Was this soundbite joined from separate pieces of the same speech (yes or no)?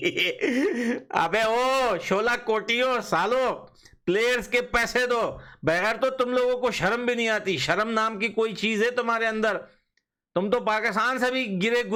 no